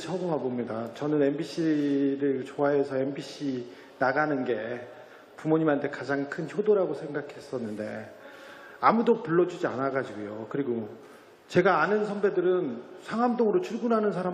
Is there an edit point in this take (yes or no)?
yes